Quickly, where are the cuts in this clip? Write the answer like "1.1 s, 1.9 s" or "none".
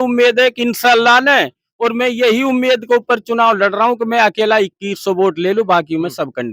none